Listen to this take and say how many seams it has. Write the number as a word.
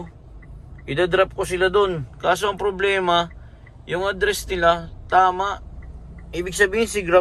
zero